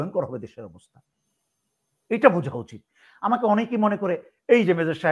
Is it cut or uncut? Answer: uncut